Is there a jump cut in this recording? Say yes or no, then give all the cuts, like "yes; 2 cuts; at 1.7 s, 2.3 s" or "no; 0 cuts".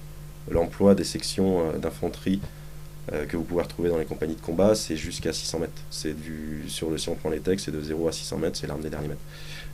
yes; 1 cut; at 5.3 s